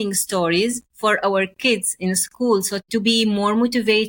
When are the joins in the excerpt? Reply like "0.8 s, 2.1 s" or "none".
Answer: 0.9 s, 2.8 s